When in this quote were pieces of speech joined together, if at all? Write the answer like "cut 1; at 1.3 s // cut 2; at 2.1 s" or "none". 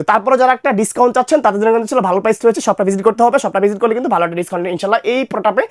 none